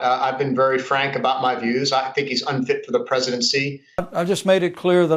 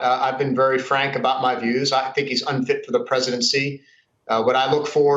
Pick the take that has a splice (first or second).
first